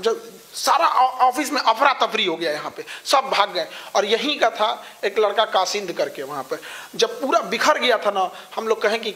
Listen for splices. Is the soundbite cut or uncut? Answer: uncut